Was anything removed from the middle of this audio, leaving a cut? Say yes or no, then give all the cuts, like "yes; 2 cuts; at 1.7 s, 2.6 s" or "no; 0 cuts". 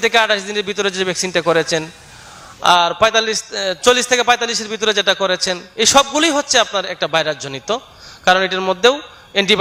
no; 0 cuts